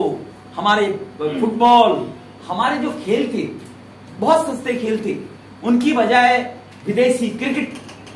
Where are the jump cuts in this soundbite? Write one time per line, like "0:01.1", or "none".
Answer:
none